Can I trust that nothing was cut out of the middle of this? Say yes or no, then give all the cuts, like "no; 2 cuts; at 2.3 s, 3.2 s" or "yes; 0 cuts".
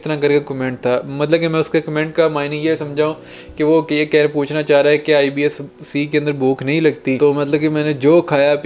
no; 1 cut; at 7.2 s